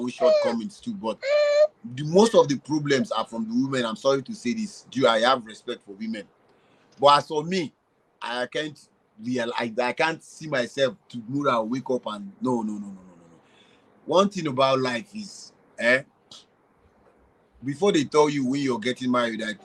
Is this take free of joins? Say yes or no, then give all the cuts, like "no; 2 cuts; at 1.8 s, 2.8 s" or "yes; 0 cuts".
yes; 0 cuts